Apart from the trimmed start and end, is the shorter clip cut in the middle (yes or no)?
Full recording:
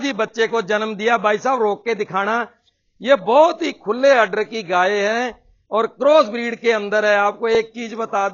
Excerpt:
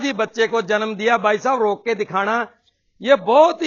no